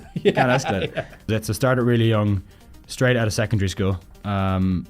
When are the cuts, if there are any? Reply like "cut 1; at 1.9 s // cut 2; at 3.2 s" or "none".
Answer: cut 1; at 1.3 s